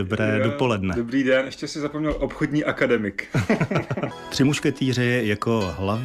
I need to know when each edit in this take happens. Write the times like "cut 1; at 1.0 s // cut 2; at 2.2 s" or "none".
cut 1; at 4.2 s